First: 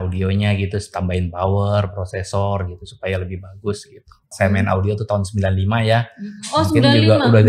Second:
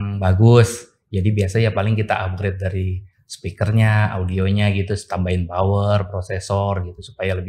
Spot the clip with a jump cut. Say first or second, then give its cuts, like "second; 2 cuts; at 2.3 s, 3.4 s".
first; 1 cut; at 4.3 s